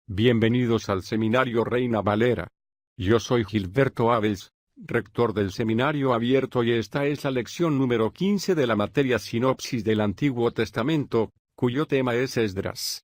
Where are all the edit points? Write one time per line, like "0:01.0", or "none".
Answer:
none